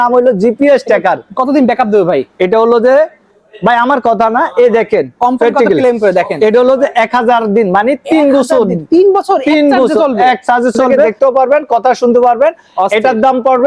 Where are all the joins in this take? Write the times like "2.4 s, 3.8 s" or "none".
11.1 s